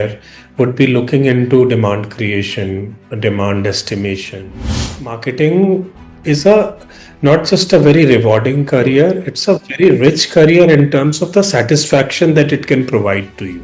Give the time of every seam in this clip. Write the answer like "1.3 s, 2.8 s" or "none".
4.9 s